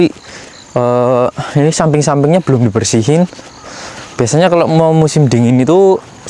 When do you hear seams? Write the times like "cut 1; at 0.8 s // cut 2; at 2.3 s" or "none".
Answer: none